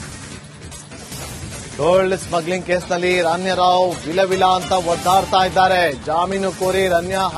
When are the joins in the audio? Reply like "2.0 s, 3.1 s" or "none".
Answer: none